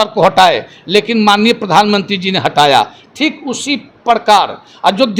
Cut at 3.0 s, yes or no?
no